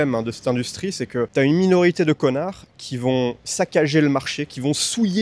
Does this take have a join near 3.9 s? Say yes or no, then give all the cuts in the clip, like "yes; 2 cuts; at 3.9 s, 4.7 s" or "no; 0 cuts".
no; 1 cut; at 1.3 s